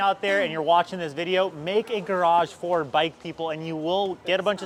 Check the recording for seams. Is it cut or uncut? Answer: uncut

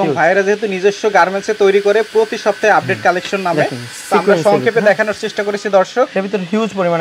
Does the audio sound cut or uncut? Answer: uncut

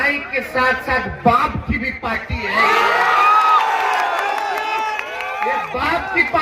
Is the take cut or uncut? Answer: uncut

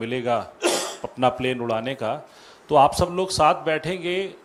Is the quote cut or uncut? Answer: uncut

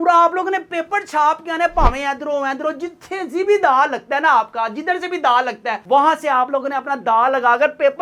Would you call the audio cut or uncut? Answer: uncut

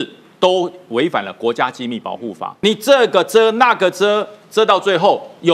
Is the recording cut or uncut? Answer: cut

